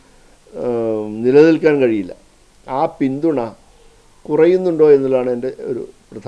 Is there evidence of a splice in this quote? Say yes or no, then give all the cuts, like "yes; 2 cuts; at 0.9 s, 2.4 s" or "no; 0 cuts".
no; 0 cuts